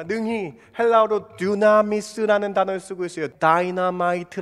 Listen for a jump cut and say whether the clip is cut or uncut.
cut